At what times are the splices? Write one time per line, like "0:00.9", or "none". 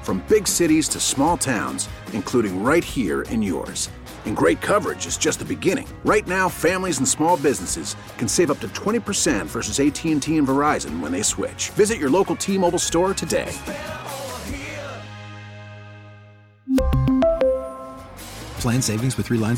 none